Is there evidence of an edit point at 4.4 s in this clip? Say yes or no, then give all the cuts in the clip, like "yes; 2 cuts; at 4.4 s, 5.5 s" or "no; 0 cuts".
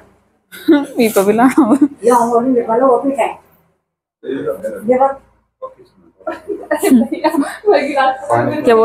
yes; 1 cut; at 4.4 s